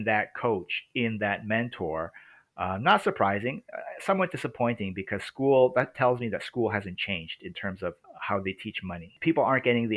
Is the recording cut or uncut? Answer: cut